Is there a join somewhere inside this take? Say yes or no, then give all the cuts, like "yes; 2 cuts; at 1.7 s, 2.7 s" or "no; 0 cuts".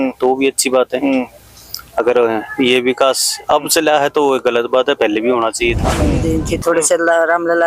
yes; 1 cut; at 6.2 s